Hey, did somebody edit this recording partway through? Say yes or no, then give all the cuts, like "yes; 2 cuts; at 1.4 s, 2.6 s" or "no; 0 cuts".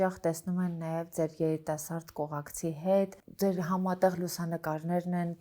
no; 0 cuts